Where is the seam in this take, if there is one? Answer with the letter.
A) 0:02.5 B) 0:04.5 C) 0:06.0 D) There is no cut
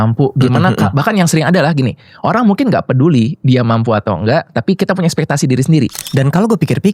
C